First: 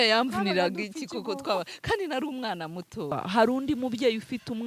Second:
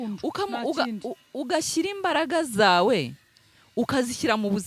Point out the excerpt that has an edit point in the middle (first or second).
first